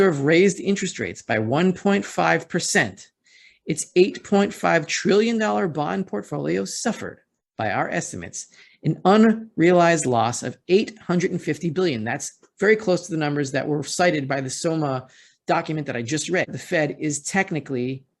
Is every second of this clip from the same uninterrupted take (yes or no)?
no